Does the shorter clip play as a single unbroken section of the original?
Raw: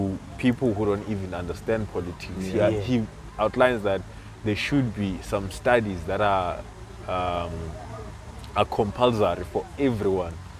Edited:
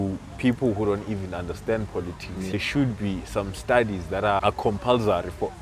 no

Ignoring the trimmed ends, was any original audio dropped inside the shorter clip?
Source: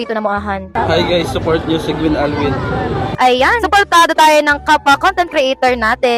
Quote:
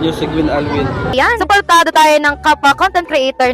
yes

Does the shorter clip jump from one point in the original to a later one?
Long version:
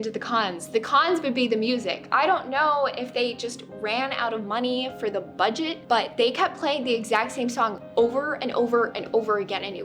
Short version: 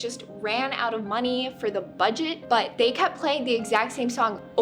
no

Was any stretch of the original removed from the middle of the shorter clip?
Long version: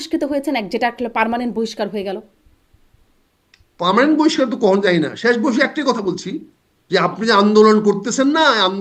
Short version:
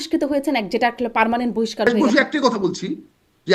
yes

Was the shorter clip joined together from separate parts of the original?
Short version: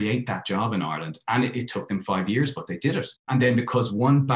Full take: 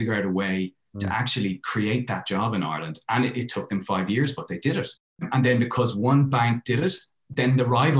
yes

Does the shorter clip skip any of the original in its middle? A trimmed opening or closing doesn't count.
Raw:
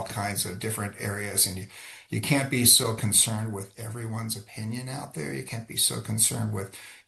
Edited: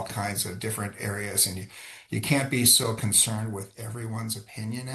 no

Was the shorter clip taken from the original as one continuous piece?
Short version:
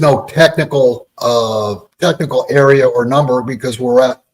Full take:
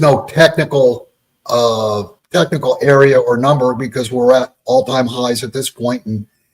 no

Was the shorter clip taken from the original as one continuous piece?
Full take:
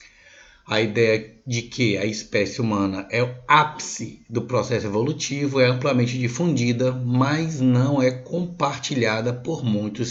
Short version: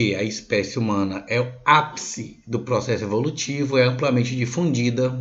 yes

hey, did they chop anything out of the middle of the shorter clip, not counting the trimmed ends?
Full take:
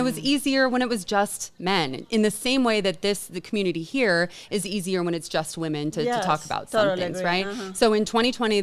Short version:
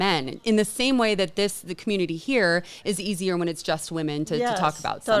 no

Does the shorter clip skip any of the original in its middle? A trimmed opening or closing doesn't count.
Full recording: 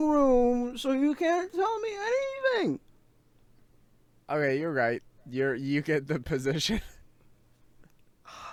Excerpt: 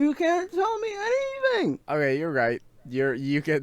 yes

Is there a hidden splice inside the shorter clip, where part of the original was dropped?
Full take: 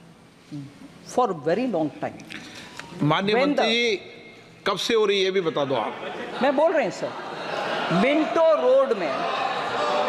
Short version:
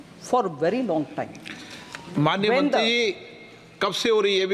no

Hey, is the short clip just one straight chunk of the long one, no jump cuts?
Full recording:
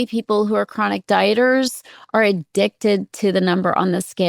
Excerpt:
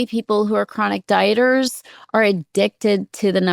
yes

